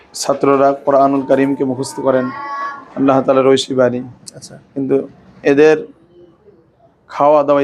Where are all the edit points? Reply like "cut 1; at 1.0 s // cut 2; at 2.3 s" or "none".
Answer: none